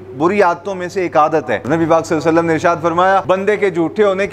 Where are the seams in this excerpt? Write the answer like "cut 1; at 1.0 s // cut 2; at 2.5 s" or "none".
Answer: cut 1; at 1.6 s // cut 2; at 3.2 s